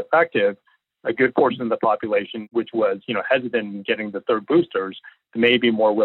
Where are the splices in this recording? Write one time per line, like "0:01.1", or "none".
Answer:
0:02.4